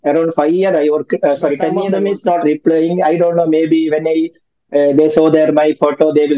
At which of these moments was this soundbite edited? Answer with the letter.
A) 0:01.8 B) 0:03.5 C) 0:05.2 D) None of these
A